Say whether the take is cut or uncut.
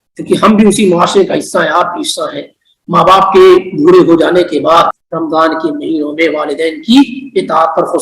cut